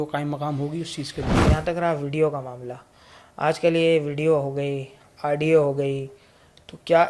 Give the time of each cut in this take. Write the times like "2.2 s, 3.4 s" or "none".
1.4 s